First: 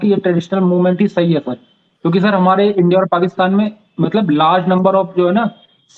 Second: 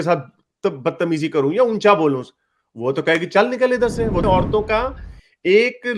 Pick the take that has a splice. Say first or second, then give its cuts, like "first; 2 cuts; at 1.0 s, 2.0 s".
second; 1 cut; at 4.2 s